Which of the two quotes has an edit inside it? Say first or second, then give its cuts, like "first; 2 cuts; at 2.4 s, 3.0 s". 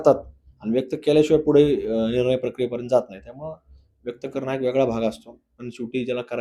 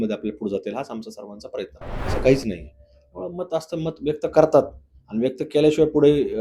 second; 1 cut; at 2.1 s